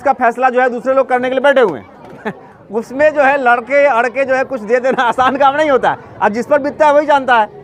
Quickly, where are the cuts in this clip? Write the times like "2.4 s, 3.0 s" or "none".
none